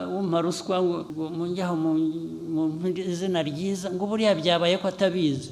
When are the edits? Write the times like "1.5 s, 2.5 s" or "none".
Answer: 1.1 s